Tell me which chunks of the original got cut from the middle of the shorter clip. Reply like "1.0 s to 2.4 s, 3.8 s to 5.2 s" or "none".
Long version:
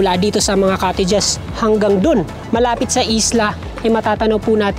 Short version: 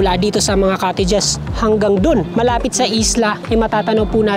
2.3 s to 2.4 s, 3.6 s to 3.7 s